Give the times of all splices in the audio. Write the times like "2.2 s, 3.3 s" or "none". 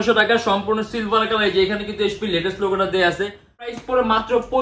3.7 s